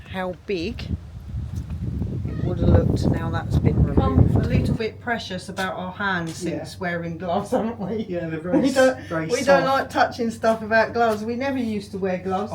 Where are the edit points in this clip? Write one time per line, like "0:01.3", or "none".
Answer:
0:04.8